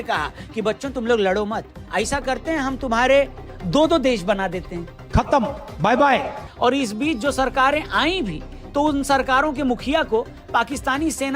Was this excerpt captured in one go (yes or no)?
no